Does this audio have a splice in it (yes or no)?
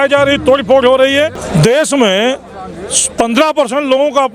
yes